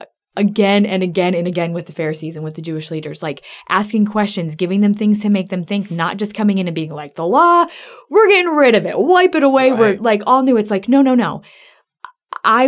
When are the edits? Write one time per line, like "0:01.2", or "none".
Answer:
none